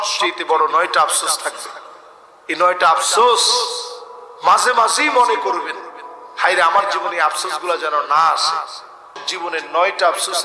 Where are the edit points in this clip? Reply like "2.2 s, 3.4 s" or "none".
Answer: 9.2 s